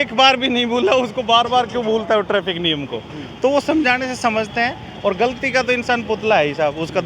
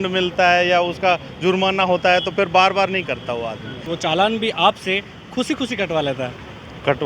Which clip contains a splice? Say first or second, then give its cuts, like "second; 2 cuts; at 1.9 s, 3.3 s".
second; 1 cut; at 3.9 s